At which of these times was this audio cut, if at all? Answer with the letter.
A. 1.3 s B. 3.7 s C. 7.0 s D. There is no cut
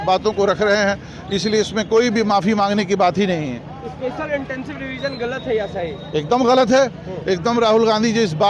D